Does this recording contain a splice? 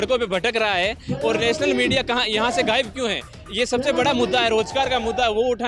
no; 0 cuts

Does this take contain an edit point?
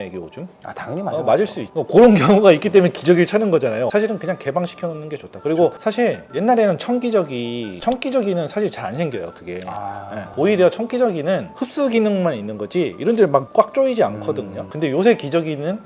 yes; 1 cut; at 1.6 s

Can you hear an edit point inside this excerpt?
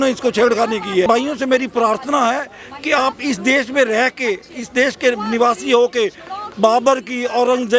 yes; 1 cut; at 1.1 s

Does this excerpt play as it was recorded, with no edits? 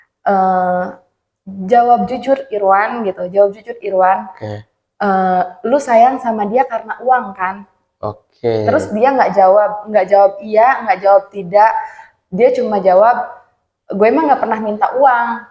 yes; 0 cuts

